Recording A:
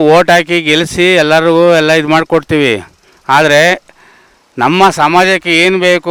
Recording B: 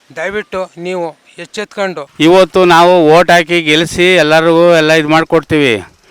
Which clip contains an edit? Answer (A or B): B